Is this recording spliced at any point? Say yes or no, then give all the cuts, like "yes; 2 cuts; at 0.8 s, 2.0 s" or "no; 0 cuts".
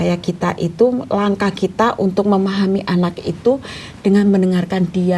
no; 0 cuts